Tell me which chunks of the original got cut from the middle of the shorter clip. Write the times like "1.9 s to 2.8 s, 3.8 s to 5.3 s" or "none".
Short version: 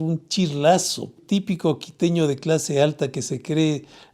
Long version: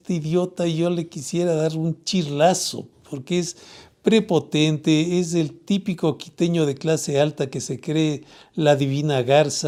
2.9 s to 5.6 s